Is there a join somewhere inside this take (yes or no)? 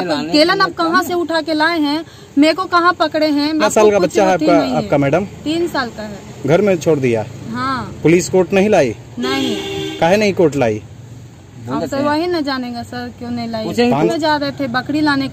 yes